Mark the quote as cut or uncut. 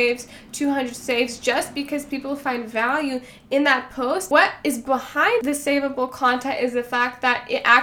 cut